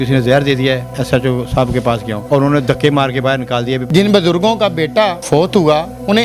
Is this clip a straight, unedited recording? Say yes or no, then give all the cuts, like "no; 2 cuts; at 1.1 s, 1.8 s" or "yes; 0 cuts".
no; 4 cuts; at 0.9 s, 2.1 s, 3.8 s, 5.2 s